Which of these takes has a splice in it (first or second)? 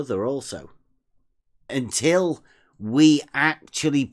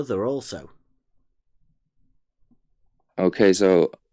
first